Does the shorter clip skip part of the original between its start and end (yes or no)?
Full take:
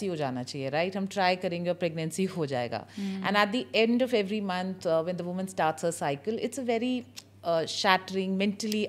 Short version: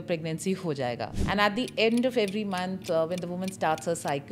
yes